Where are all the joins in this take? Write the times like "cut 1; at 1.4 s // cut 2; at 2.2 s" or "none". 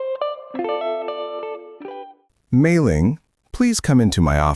cut 1; at 1.8 s